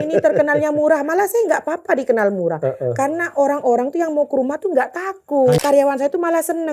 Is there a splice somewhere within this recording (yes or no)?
yes